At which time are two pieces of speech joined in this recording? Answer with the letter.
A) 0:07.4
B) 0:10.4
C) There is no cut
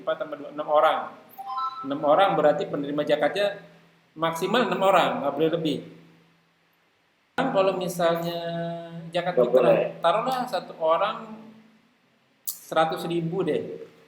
C